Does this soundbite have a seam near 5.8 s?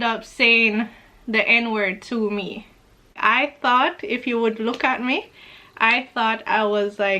no; 1 cut; at 3.2 s

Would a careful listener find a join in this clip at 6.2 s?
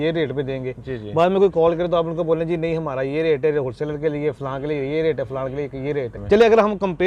yes; 1 cut; at 6.2 s

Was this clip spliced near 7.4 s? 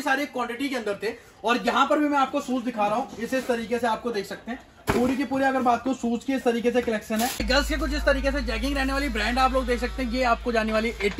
yes; 1 cut; at 7.4 s

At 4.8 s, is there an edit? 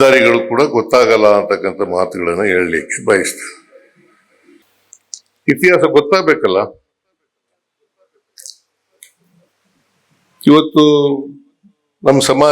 yes; 1 cut; at 4.8 s

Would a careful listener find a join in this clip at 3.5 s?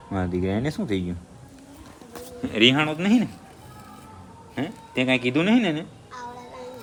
no; 0 cuts

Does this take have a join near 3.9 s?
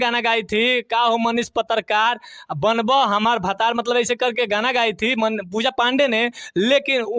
no; 0 cuts

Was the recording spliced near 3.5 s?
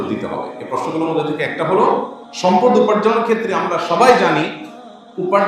no; 1 cut; at 2.2 s

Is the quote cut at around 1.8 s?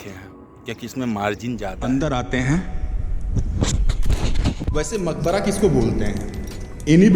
yes; 1 cut; at 1.8 s

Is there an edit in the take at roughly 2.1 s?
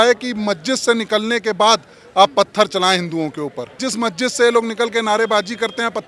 no; 1 cut; at 3.8 s

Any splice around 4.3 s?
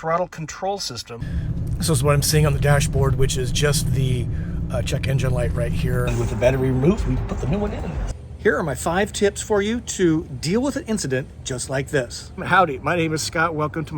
no; 4 cuts; at 1.6 s, 6.1 s, 8.1 s, 12.4 s

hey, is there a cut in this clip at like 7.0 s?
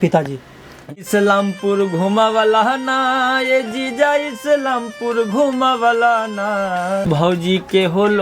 yes; 2 cuts; at 1.0 s, 7.0 s

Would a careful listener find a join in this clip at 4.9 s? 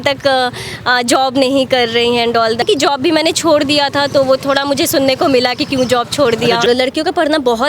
no; 2 cuts; at 2.6 s, 6.6 s

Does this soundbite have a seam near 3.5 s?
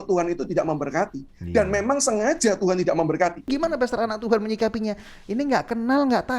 yes; 1 cut; at 3.5 s

